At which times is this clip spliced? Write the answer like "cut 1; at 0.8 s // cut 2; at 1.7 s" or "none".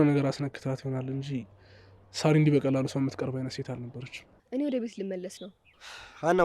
cut 1; at 4.4 s